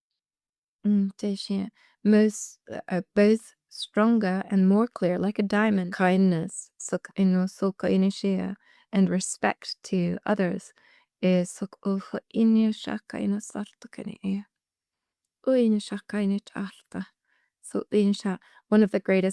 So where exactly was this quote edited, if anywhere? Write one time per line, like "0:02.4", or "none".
0:05.9